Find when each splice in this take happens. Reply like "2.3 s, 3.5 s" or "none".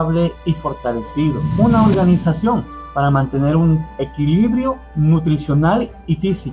1.4 s